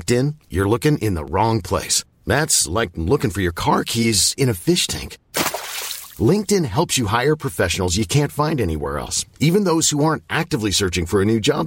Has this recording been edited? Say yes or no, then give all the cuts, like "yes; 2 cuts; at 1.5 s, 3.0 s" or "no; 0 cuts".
no; 0 cuts